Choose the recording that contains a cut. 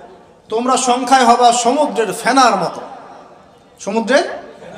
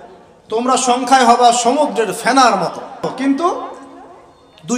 second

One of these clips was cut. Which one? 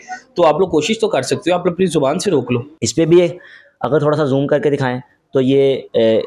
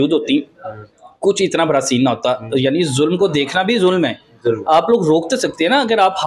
first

